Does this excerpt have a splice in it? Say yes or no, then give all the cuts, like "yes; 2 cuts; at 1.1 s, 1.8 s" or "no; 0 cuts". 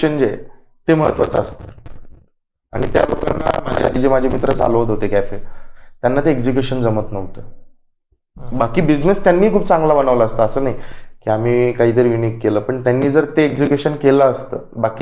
no; 0 cuts